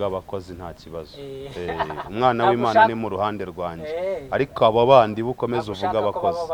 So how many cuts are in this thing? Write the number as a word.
zero